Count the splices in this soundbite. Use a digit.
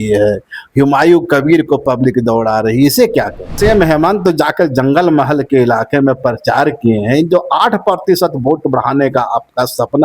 1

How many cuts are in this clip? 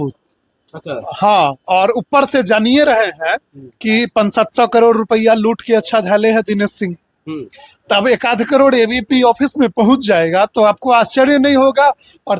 0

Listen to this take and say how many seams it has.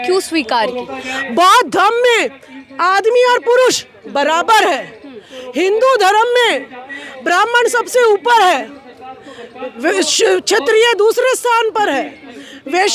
0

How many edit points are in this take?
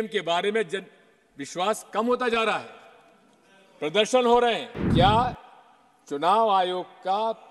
1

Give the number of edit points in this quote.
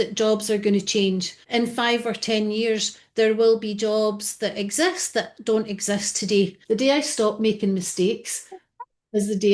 2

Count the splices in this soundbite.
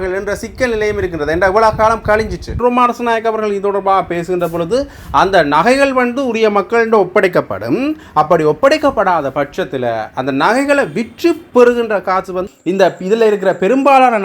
2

